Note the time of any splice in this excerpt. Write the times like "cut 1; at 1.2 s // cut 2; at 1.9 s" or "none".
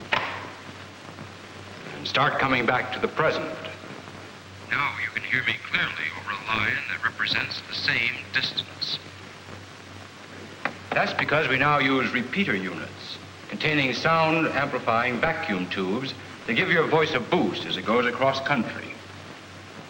cut 1; at 16.9 s